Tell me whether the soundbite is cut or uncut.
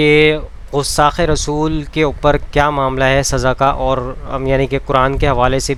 uncut